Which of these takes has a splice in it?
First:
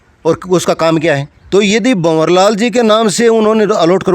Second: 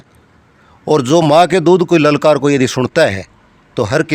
first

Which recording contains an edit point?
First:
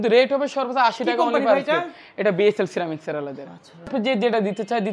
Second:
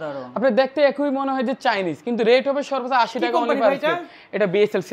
first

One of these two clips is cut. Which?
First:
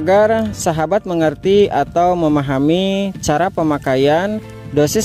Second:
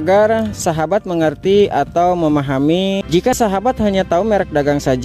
second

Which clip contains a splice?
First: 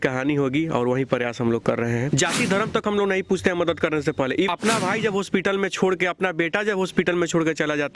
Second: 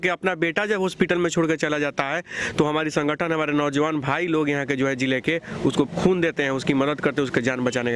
first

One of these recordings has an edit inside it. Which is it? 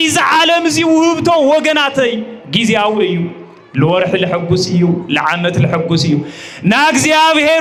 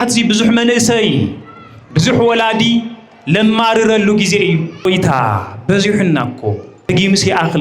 second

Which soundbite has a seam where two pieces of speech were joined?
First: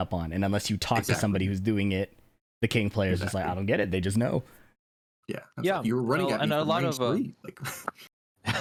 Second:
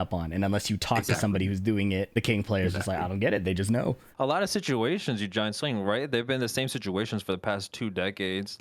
second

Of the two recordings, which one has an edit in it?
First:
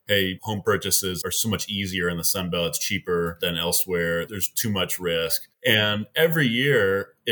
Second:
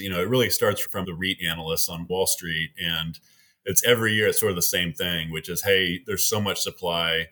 second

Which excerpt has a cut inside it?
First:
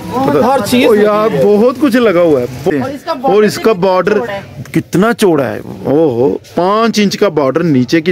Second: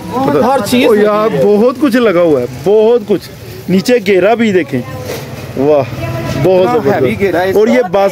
first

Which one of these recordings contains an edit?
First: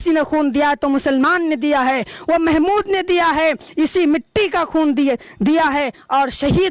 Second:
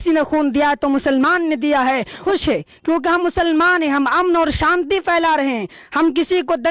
second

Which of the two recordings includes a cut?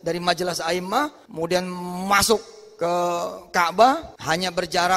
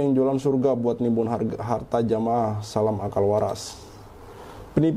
first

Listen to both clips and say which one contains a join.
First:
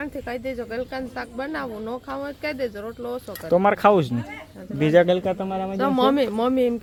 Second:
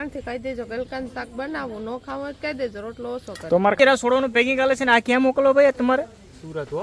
second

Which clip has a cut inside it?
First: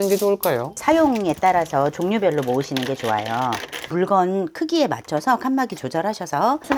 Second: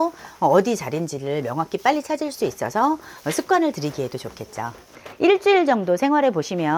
second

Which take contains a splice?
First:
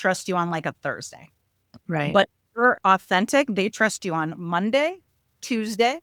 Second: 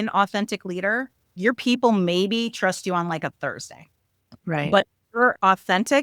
second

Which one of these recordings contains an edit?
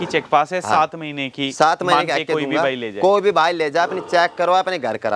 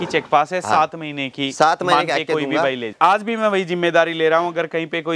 second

